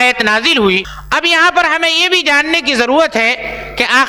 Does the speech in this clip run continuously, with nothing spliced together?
no; 1 cut; at 0.9 s

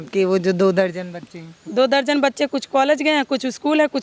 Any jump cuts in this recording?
no; 0 cuts

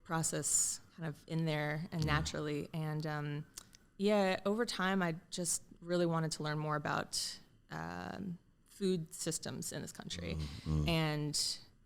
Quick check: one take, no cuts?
yes; 0 cuts

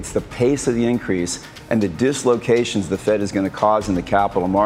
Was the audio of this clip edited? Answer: no; 0 cuts

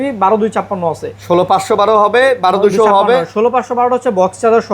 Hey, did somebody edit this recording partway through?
no; 0 cuts

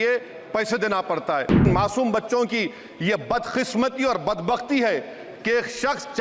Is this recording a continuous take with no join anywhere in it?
no; 1 cut; at 1.6 s

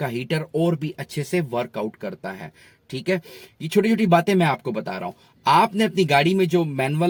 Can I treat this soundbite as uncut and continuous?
yes; 0 cuts

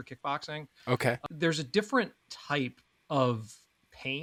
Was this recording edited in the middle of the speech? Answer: no; 0 cuts

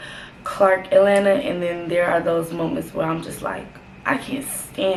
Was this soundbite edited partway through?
no; 0 cuts

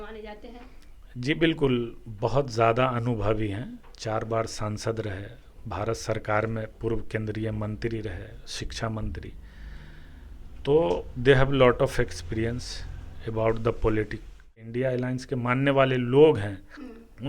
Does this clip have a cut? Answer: yes; 1 cut; at 14.7 s

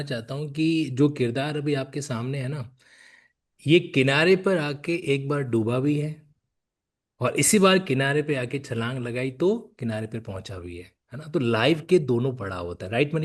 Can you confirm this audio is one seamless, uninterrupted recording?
yes; 0 cuts

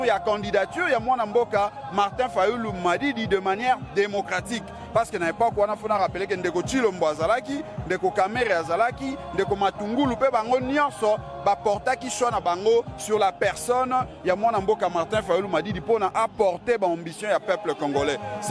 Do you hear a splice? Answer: no; 0 cuts

